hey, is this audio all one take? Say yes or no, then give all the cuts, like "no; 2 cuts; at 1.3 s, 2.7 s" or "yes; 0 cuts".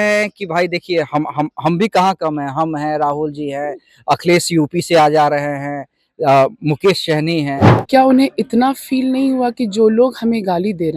no; 1 cut; at 7.7 s